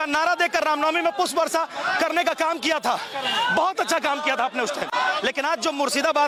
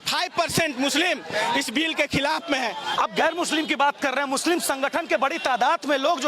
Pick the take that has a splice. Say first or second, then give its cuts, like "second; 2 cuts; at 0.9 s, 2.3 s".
second; 1 cut; at 2.9 s